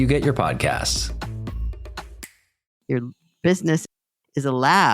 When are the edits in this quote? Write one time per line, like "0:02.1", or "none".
0:02.7